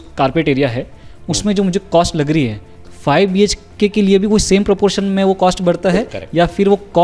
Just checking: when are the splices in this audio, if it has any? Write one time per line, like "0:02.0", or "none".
none

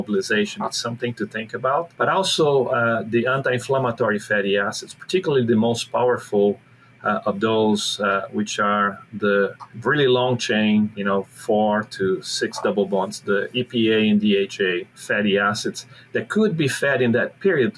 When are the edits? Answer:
0:01.9
0:09.7
0:10.9
0:14.9

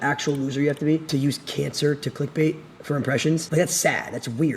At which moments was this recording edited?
0:01.2
0:03.5

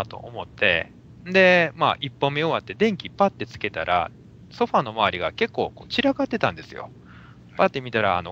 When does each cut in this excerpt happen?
0:01.5

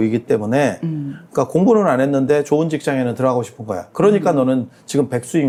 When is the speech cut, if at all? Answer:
none

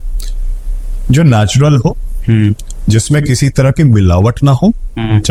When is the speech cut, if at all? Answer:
none

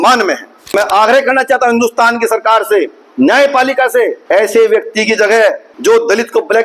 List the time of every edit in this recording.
0:00.7
0:04.2
0:05.7

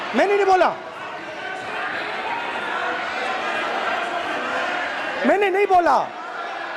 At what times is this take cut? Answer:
none

